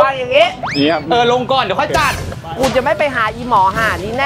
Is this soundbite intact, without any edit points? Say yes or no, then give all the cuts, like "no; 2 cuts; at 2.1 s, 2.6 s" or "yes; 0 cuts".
yes; 0 cuts